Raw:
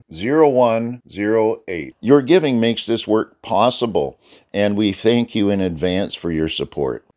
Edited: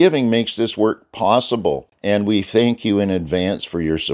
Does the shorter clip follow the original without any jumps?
no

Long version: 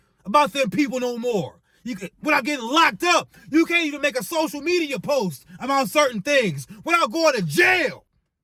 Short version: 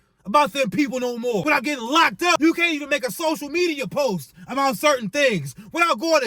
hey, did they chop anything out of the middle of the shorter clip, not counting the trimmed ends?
yes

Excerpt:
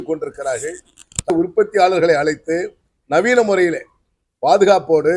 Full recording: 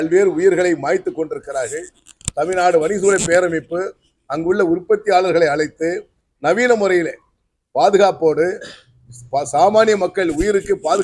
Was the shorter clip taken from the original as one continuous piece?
no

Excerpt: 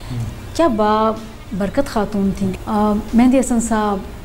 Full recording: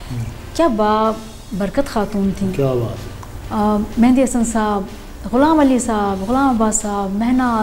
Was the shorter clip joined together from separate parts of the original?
yes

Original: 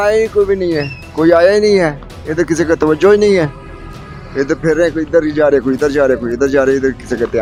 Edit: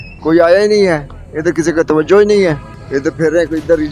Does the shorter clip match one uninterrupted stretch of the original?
no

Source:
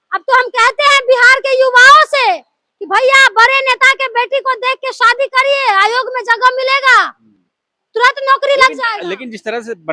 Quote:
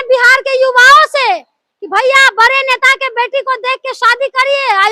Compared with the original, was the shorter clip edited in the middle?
no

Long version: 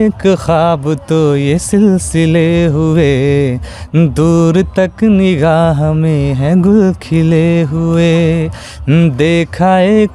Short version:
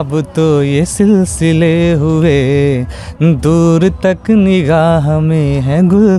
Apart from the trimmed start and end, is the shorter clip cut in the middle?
no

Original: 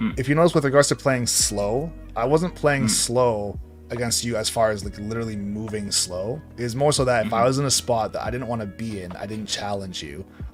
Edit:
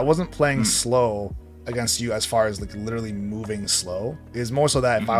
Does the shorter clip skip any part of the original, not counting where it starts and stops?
no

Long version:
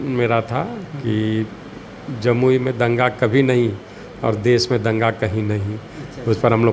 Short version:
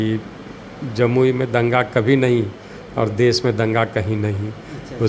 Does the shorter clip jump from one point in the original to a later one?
no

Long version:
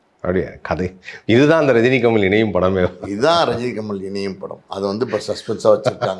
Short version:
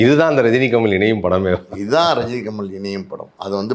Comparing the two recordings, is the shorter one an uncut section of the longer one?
yes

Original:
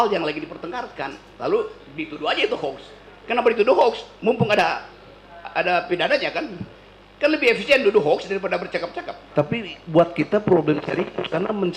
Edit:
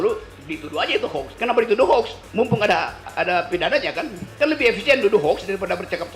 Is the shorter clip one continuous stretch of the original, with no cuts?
no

